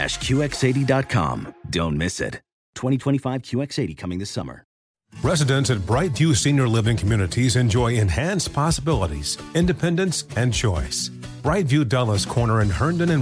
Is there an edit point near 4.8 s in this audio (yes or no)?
yes